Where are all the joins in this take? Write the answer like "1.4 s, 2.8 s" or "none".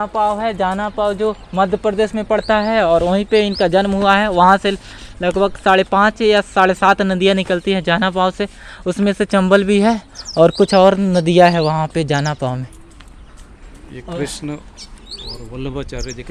none